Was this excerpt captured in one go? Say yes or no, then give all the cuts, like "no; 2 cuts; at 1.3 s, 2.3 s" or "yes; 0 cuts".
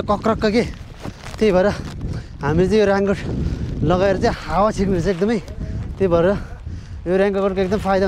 yes; 0 cuts